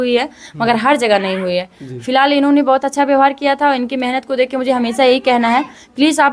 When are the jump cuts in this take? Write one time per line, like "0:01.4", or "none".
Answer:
none